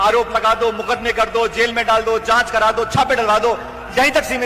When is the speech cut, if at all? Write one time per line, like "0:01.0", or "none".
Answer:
none

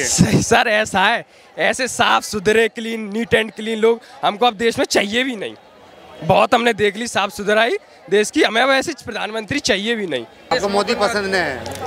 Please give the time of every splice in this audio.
0:10.5

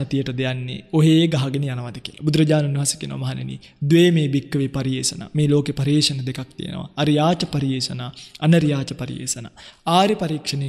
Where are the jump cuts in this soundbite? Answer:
none

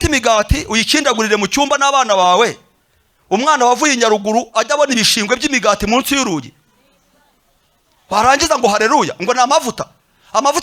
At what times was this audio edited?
none

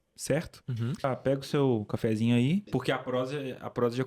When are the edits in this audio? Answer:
0:01.0
0:02.7

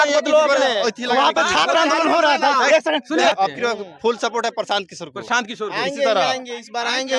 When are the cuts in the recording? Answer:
0:03.3

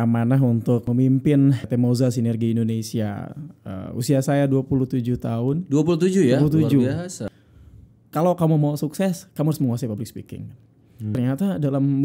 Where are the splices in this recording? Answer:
0:00.9
0:01.6
0:07.2
0:11.1

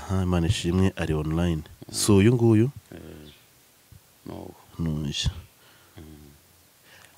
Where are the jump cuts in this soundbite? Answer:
none

